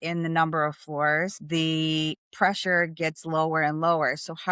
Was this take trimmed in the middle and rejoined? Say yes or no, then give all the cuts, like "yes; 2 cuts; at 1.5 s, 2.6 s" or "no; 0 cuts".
yes; 1 cut; at 1.4 s